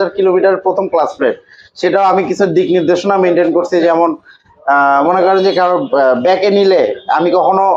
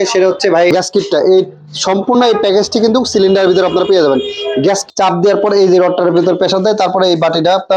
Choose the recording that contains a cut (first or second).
second